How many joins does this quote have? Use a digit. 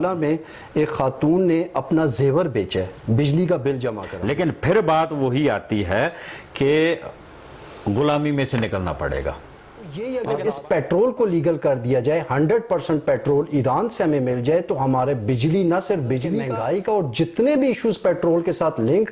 3